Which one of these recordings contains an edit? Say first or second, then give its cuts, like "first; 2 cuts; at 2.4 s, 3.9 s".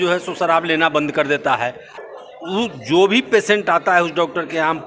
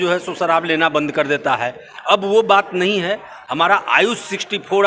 first; 1 cut; at 1.9 s